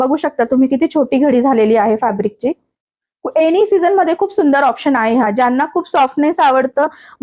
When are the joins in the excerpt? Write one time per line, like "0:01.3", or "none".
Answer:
none